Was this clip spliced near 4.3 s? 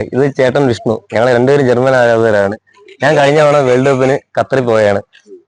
no; 0 cuts

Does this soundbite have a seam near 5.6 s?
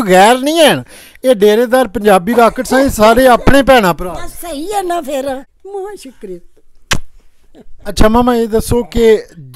yes; 1 cut; at 5.6 s

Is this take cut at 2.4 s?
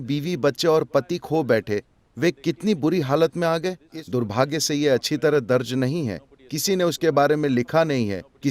no; 1 cut; at 3.8 s

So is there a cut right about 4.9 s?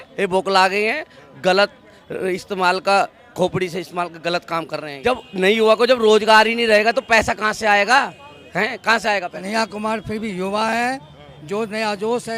yes; 2 cuts; at 4.9 s, 9.4 s

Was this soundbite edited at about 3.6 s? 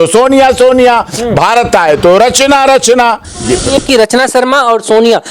yes; 1 cut; at 3.6 s

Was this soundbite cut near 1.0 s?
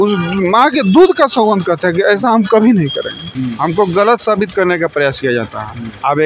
no; 1 cut; at 3.2 s

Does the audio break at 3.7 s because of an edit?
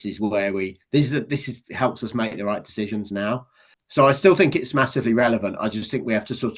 yes; 1 cut; at 3.7 s

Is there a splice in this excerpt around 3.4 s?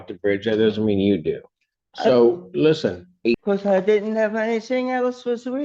yes; 1 cut; at 3.4 s

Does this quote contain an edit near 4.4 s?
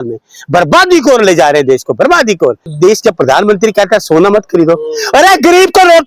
no; 1 cut; at 2.7 s

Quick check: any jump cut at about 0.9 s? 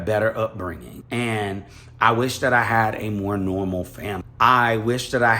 yes; 2 cuts; at 0.9 s, 4.2 s

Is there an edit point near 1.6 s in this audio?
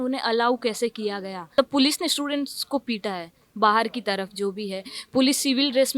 yes; 1 cut; at 1.6 s

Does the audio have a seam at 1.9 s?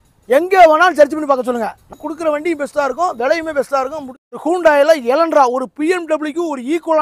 yes; 2 cuts; at 1.9 s, 4.3 s

